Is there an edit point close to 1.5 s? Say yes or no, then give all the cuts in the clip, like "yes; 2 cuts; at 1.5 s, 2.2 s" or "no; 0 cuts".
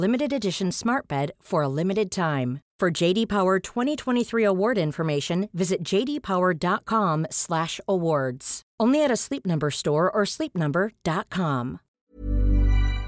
no; 1 cut; at 11.9 s